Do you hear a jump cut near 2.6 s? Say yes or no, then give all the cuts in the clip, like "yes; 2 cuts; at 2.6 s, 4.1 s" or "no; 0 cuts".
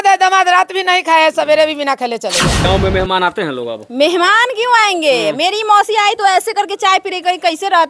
yes; 1 cut; at 2.6 s